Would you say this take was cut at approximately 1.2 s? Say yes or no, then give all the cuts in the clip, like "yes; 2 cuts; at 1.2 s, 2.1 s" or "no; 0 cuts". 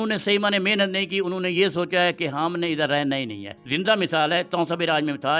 no; 1 cut; at 3.6 s